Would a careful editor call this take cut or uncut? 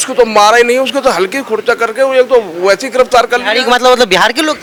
uncut